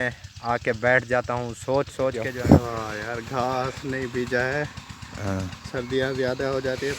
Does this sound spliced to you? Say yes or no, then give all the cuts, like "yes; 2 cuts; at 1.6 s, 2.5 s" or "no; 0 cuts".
yes; 1 cut; at 2.3 s